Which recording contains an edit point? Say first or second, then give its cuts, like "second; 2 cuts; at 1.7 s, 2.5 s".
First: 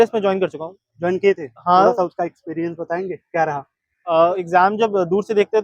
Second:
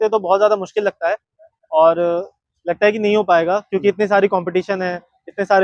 first; 1 cut; at 4.4 s